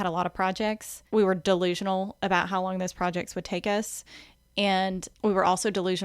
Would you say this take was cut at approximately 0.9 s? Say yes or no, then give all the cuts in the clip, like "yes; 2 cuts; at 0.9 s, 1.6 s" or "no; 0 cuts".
yes; 2 cuts; at 0.9 s, 5.1 s